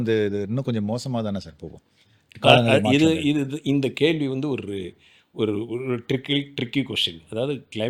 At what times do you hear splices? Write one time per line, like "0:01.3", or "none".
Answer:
none